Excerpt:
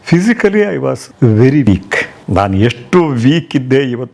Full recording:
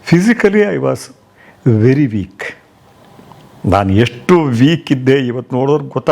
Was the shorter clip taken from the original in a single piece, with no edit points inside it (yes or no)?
no